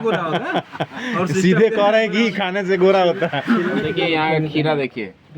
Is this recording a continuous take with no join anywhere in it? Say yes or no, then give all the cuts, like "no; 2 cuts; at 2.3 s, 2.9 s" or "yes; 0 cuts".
no; 1 cut; at 3.9 s